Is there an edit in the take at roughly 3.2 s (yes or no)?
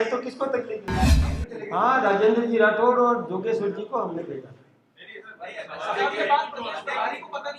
no